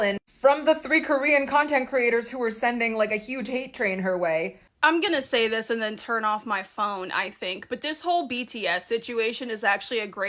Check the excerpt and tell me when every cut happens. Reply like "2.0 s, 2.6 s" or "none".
4.6 s